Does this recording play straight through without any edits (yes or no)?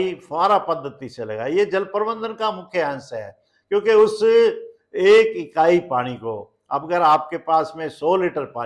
yes